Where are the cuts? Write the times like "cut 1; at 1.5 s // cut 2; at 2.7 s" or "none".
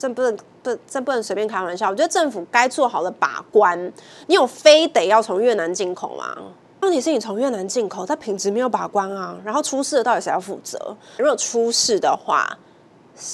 cut 1; at 6.8 s // cut 2; at 11.2 s